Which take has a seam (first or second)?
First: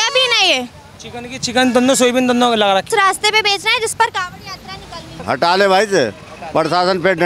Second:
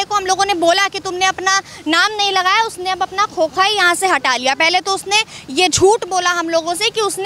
first